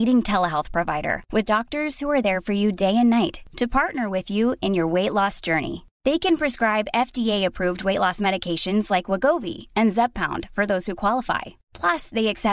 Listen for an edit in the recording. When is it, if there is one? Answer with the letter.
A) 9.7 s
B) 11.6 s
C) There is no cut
C